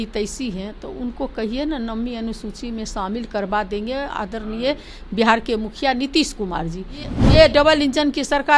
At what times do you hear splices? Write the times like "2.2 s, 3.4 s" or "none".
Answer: 7.1 s